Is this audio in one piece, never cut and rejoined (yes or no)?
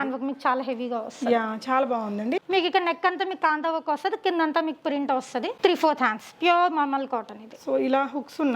no